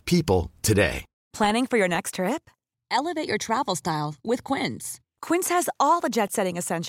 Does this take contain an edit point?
yes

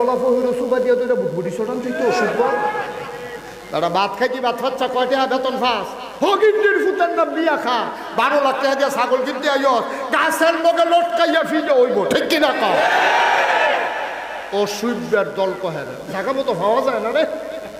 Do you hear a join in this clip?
no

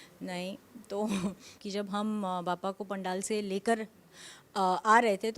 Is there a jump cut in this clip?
yes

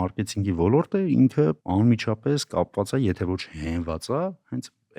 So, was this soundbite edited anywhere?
yes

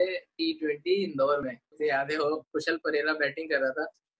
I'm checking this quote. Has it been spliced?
yes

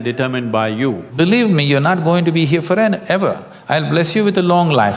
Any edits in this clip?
yes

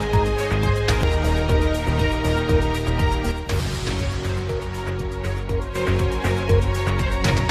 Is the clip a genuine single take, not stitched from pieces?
yes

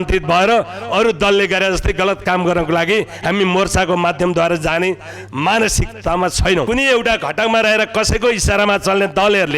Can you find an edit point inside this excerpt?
yes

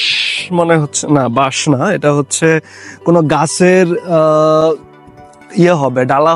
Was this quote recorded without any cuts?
yes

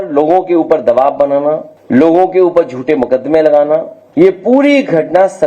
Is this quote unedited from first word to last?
no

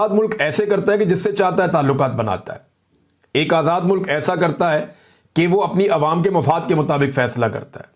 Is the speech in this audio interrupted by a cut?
no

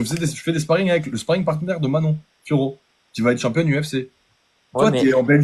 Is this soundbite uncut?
yes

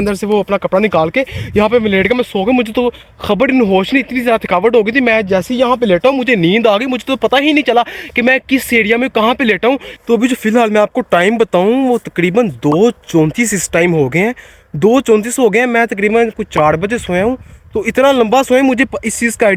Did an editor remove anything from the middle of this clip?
no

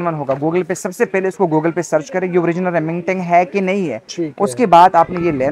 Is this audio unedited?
yes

